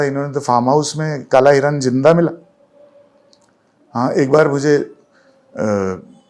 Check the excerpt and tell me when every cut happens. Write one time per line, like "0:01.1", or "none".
none